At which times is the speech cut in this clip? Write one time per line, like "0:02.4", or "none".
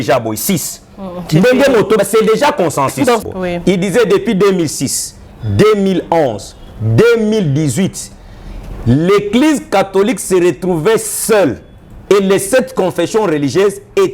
0:03.2

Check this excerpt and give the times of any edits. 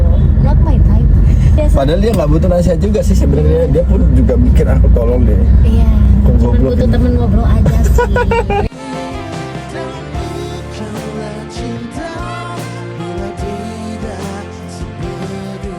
0:01.6

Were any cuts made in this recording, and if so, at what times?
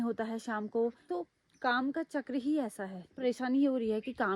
0:01.0
0:03.1

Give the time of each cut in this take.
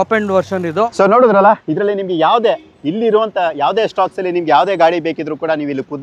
0:00.9

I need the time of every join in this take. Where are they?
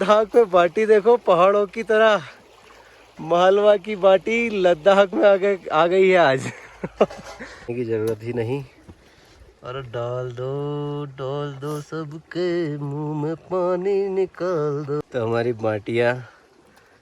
0:07.7
0:15.0

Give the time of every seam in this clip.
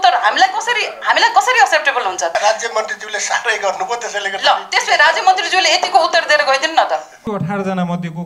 0:02.3
0:07.1

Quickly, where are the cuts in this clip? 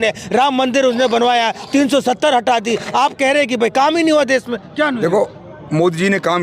none

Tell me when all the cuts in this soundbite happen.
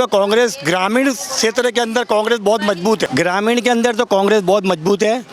0:03.1

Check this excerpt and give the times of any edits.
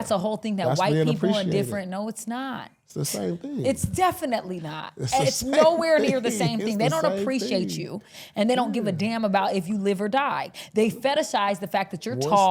none

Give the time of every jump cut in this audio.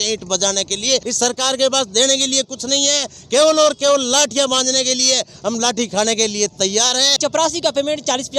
0:01.0
0:07.2

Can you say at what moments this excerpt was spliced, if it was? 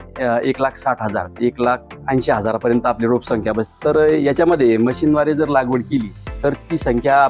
0:03.8

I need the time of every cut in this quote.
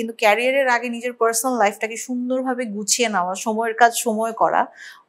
none

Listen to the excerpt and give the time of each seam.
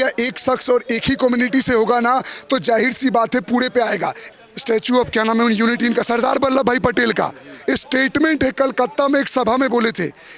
0:04.2

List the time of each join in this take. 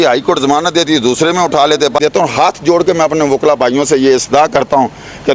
0:02.0

